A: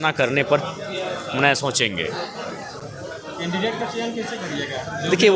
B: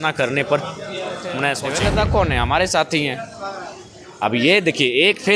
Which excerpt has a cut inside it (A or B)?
B